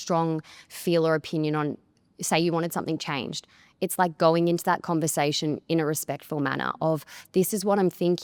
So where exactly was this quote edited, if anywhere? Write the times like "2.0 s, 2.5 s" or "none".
none